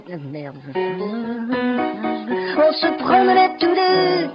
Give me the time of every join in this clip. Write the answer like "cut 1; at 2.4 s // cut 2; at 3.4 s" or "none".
cut 1; at 1.0 s

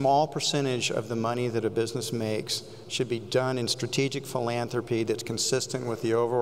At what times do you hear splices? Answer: none

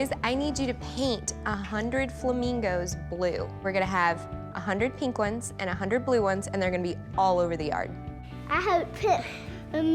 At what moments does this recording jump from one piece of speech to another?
cut 1; at 3.5 s

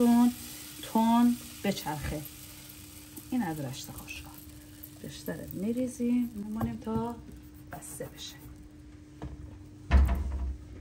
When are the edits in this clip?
none

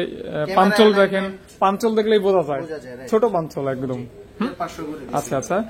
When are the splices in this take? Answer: cut 1; at 4.5 s

